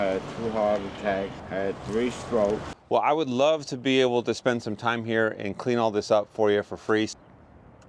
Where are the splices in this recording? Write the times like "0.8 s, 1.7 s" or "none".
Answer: 1.4 s, 2.7 s, 7.1 s